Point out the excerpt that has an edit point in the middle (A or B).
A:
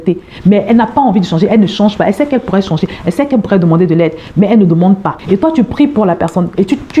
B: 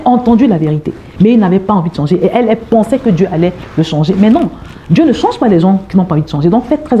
A